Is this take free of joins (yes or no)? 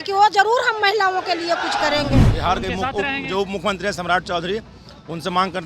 no